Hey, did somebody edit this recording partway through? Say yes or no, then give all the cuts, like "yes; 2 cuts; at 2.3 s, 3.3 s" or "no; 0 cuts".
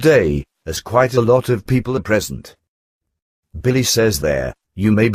yes; 1 cut; at 3.9 s